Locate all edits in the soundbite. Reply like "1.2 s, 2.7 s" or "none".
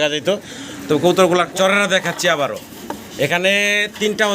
1.5 s